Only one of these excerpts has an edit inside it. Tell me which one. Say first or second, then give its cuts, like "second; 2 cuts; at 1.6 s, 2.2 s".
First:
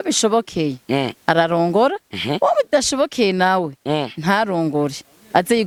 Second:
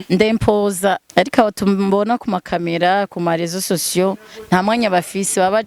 second; 1 cut; at 1.0 s